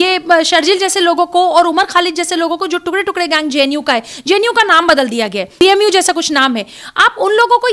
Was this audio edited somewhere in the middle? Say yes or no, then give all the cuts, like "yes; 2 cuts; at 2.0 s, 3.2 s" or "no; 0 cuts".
yes; 1 cut; at 5.6 s